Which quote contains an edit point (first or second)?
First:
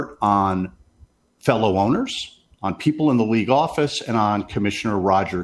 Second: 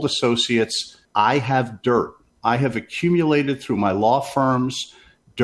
second